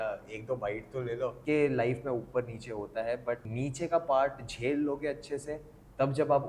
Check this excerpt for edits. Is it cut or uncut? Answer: cut